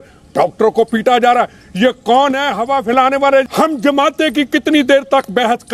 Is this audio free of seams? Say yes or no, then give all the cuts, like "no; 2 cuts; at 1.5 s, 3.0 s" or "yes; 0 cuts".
no; 1 cut; at 3.5 s